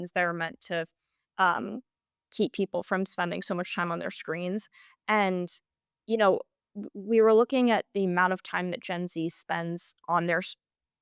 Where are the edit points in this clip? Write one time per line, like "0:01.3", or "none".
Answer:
none